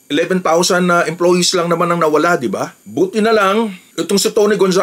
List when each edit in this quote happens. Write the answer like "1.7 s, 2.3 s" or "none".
2.8 s